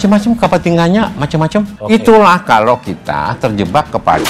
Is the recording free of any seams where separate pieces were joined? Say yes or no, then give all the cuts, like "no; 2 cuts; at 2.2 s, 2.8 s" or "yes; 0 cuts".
no; 1 cut; at 1.8 s